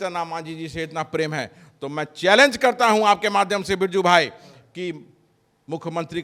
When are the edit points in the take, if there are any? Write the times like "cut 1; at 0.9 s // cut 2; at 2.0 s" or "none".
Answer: none